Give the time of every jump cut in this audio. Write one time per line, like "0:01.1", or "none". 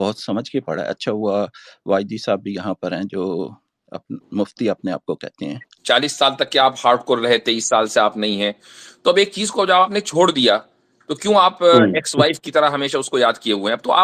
0:05.7